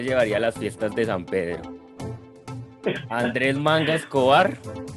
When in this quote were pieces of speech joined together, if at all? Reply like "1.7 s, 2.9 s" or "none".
none

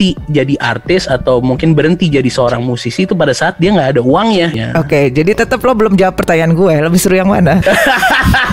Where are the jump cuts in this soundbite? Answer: 4.6 s, 7.6 s

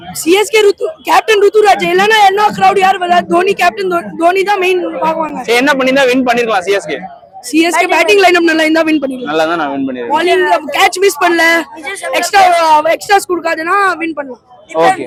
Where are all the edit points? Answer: none

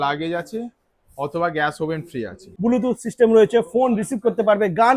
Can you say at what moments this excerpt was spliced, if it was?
2.4 s

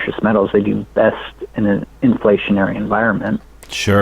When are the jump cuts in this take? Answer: none

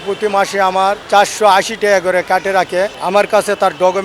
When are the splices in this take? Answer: 1.0 s, 3.0 s

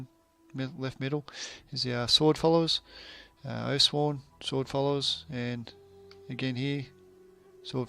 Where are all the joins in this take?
none

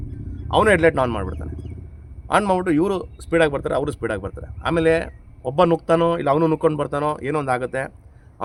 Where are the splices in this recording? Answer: none

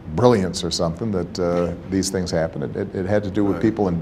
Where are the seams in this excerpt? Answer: none

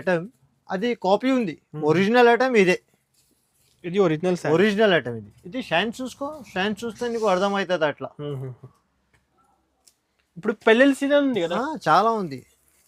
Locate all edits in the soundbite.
none

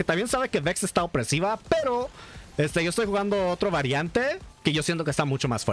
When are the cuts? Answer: none

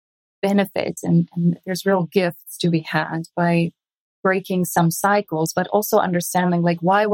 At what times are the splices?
3.7 s

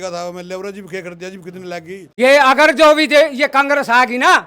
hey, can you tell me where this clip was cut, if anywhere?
2.0 s

